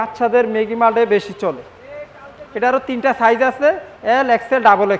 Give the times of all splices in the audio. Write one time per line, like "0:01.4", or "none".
none